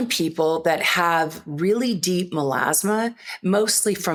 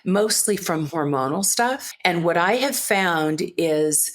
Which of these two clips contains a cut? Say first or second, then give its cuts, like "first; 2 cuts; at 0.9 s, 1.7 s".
second; 1 cut; at 1.9 s